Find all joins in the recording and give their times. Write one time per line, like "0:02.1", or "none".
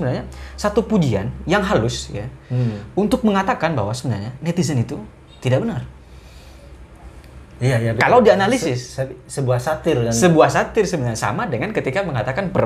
none